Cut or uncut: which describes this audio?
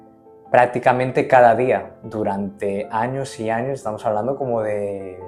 uncut